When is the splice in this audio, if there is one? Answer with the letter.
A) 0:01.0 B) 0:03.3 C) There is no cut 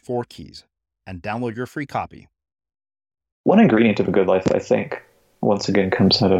B